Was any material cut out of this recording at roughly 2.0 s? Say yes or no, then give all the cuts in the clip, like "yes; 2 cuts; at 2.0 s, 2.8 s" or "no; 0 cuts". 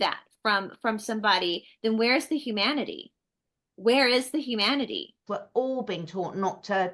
no; 1 cut; at 5.2 s